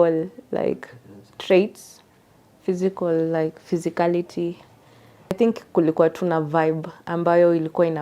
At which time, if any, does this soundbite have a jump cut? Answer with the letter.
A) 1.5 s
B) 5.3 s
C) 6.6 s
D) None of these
B